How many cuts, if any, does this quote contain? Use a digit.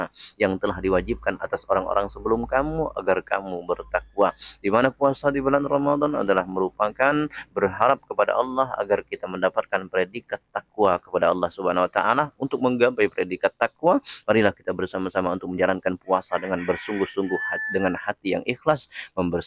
0